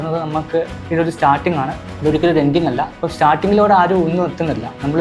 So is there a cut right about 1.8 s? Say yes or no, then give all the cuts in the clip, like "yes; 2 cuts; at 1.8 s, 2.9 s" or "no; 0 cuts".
yes; 2 cuts; at 1.8 s, 3.0 s